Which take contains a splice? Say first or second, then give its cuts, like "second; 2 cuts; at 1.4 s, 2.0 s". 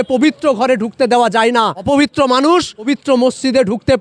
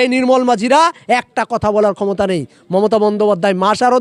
first; 2 cuts; at 1.8 s, 2.9 s